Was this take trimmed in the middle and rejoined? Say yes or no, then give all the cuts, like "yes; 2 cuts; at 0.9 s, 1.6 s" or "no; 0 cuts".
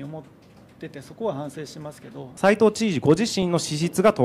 yes; 1 cut; at 2.2 s